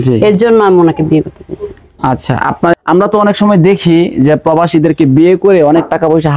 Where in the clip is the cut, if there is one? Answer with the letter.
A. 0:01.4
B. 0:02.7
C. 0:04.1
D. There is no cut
B